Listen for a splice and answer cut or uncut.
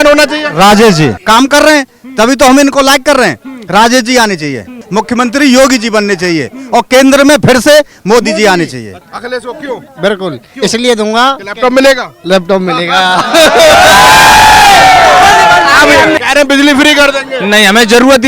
cut